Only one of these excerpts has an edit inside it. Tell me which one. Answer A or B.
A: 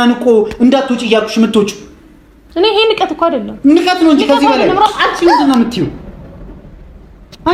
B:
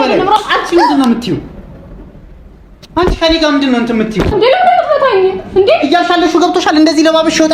B